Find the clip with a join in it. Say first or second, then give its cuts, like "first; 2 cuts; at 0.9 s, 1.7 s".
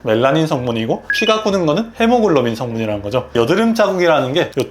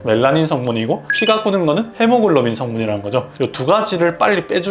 second; 1 cut; at 3.3 s